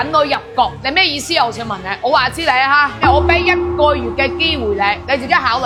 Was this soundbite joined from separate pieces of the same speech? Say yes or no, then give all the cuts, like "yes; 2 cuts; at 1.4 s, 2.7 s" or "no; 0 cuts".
no; 0 cuts